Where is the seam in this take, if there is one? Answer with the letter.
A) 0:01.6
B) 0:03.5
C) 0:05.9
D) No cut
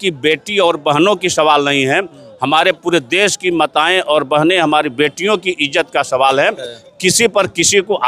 D